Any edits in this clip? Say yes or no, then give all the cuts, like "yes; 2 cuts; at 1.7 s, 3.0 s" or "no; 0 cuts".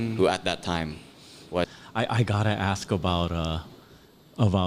yes; 1 cut; at 1.7 s